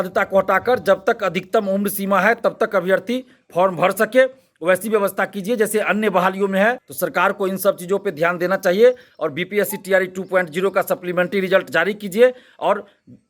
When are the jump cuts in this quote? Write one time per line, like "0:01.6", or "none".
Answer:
0:06.9